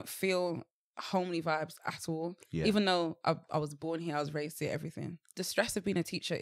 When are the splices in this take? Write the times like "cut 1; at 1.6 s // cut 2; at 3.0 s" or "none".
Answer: cut 1; at 5.2 s